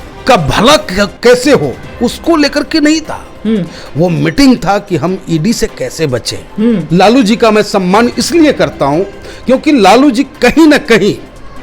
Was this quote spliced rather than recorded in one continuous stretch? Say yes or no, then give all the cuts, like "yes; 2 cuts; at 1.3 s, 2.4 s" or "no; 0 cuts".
yes; 1 cut; at 6.8 s